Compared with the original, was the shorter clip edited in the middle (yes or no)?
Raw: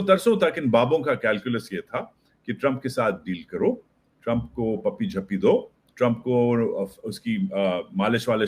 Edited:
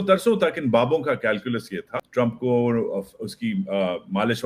yes